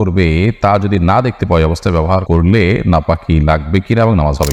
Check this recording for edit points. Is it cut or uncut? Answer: cut